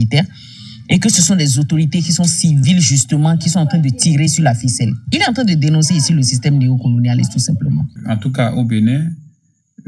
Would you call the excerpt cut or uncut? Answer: cut